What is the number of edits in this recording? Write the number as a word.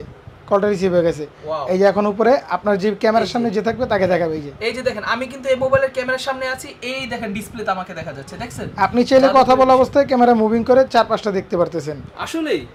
zero